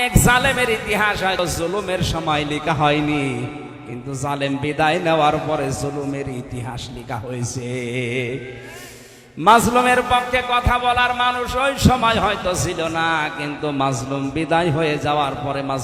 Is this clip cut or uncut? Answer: cut